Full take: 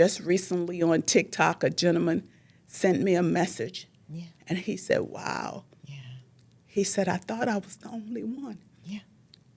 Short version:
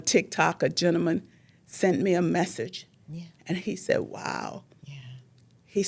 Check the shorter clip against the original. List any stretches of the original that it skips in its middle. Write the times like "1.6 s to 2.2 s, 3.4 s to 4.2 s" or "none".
none